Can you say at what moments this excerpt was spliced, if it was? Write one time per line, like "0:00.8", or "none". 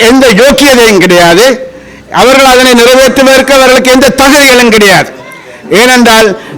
none